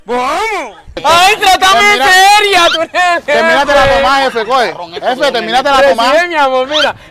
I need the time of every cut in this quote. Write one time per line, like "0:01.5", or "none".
none